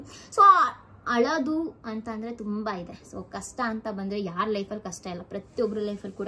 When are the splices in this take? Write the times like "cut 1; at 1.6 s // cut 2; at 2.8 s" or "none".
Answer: none